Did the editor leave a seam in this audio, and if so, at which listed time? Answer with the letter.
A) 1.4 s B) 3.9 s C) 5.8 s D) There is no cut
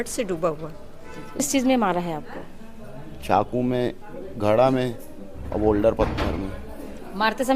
A